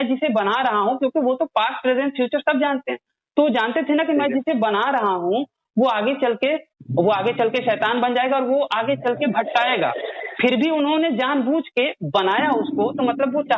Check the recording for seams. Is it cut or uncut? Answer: cut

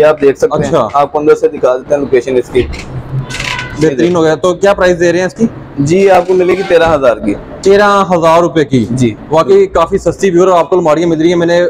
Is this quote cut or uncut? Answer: uncut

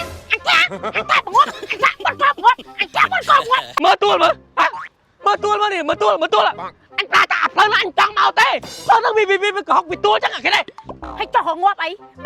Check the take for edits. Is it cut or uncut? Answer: cut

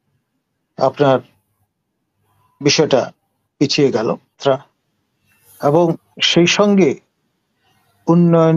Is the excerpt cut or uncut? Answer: cut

